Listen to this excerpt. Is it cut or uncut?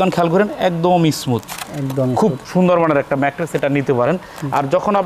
uncut